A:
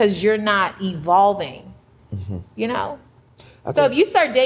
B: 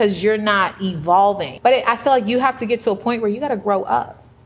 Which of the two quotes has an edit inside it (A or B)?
B